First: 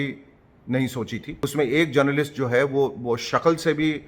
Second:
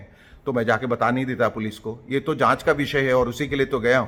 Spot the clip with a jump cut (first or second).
first